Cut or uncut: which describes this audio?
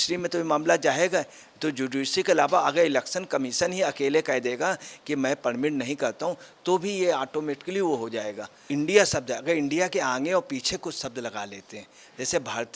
cut